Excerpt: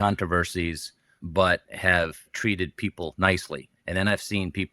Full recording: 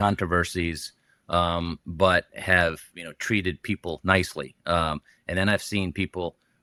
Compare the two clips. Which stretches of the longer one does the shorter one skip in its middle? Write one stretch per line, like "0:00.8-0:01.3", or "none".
0:01.1-0:01.8
0:02.9-0:03.1
0:04.5-0:05.1

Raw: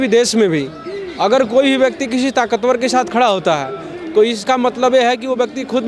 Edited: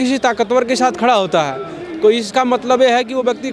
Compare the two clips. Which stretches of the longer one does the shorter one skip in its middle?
none

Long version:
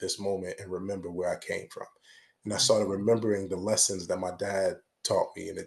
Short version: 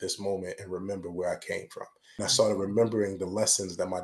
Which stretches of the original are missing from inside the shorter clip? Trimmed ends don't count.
0:02.0-0:02.3

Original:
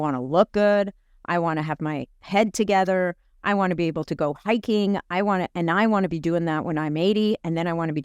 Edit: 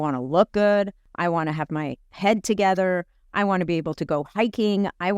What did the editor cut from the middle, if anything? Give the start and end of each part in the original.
0:01.0-0:01.1

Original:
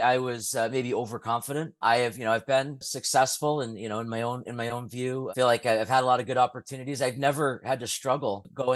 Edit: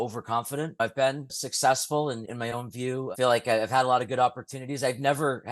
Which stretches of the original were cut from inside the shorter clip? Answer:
0:01.8-0:02.3
0:03.8-0:04.5

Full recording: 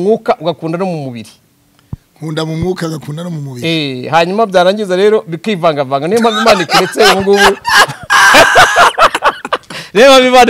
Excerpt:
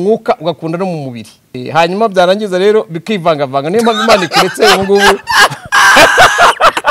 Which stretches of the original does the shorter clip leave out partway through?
0:01.6-0:04.0

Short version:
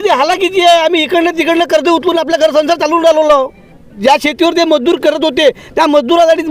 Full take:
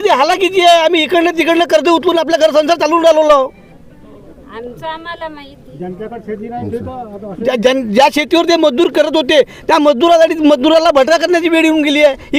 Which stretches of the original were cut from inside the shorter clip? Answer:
0:04.0-0:07.9

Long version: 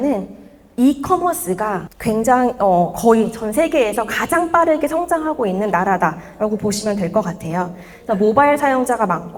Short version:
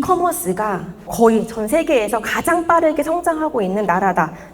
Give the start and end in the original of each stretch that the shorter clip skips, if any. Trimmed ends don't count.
0:02.1-0:02.9

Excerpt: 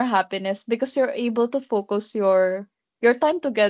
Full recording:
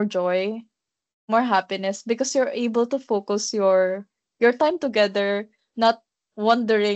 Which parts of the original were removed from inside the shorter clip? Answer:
none

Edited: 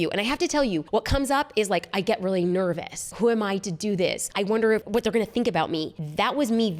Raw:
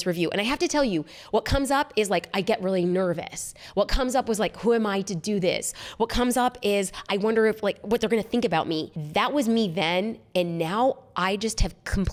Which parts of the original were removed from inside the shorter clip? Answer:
0:01.1-0:01.3
0:03.5-0:04.6
0:06.1-0:07.6

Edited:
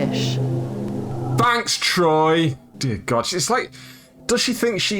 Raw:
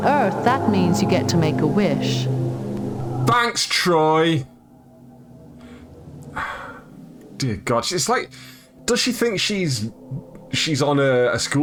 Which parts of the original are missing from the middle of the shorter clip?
0:04.5-0:07.2

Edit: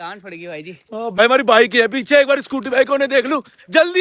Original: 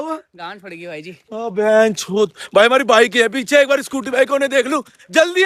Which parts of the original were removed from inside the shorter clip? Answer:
0:01.6-0:02.6

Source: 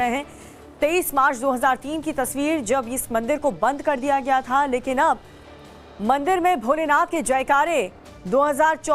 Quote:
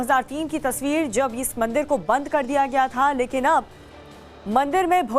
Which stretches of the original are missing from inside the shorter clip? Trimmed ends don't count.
none

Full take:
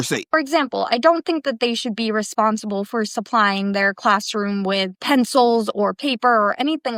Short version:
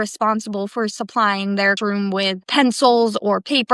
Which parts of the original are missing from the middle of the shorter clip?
0:03.9-0:04.3

